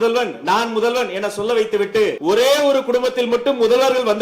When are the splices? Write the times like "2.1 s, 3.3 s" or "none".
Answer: 2.2 s